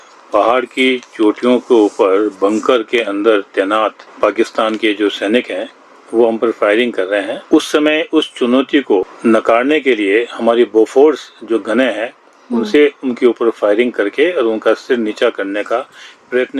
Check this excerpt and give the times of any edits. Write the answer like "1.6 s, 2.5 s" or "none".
4.0 s, 7.4 s, 9.1 s